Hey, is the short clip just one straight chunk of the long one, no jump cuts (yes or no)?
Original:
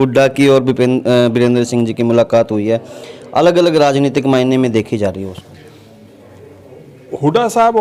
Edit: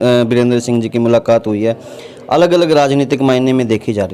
yes